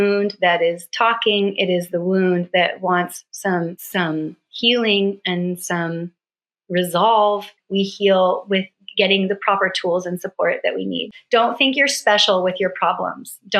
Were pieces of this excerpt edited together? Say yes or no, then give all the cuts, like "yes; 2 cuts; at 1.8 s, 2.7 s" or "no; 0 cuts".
yes; 3 cuts; at 3.8 s, 7.5 s, 11.1 s